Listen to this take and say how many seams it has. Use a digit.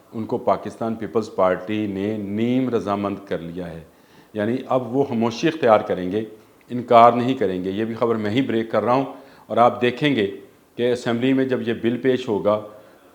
0